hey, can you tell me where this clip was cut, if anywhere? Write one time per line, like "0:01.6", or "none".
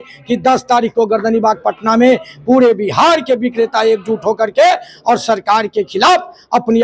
none